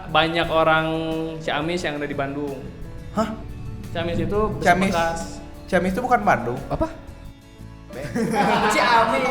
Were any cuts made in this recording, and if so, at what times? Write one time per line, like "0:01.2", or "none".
0:03.5